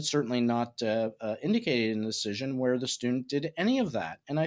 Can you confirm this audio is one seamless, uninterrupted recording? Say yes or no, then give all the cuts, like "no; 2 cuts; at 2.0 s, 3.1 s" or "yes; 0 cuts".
yes; 0 cuts